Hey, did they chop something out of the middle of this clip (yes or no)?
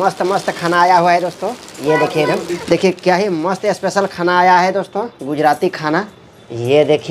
yes